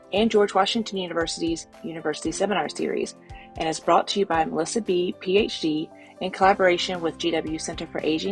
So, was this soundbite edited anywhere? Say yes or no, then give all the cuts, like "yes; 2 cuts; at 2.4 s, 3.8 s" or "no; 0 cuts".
no; 0 cuts